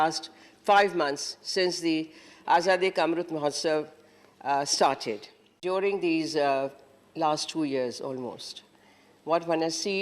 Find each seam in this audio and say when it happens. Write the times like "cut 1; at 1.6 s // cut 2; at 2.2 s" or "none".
cut 1; at 5.6 s